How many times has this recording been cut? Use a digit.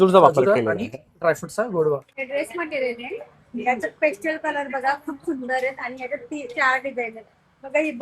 1